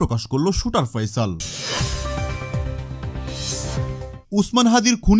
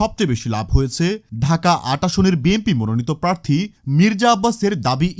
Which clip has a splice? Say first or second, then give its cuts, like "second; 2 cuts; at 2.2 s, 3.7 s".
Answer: first; 2 cuts; at 1.5 s, 4.2 s